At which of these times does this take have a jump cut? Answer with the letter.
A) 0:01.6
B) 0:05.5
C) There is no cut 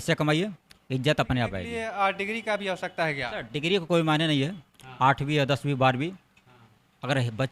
A